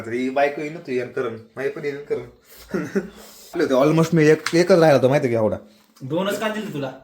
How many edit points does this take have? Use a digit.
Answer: 1